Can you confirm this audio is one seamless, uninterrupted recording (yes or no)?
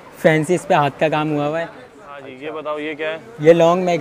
no